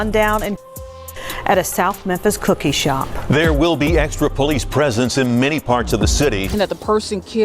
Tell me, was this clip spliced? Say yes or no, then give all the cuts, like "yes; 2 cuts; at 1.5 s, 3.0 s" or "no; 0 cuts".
yes; 1 cut; at 6.5 s